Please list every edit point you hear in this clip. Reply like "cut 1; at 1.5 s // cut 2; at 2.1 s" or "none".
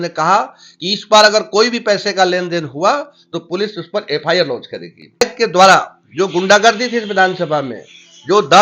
cut 1; at 5.2 s